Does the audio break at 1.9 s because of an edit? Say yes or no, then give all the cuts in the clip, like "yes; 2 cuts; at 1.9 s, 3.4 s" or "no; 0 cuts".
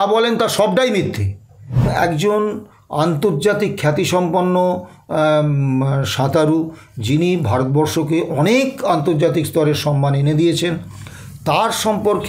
yes; 1 cut; at 1.9 s